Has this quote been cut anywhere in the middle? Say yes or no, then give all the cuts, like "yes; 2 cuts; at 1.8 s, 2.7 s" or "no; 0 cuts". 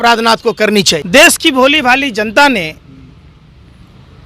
yes; 1 cut; at 1.0 s